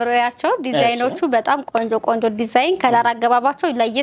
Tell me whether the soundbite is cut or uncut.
uncut